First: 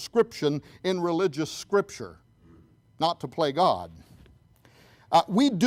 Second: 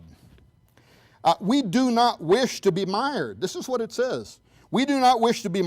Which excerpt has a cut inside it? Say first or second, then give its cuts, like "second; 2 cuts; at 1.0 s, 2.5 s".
second; 1 cut; at 3.7 s